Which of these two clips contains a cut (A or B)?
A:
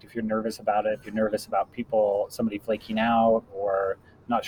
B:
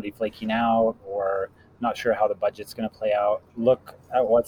B